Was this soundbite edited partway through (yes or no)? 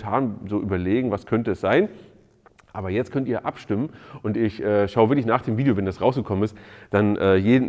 no